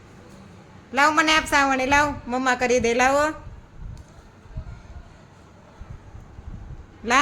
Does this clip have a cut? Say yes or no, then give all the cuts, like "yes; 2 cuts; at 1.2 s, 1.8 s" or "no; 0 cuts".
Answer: no; 0 cuts